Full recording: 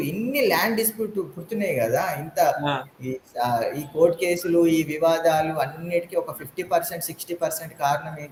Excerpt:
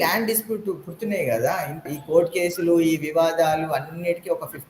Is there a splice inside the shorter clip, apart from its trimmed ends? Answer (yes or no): yes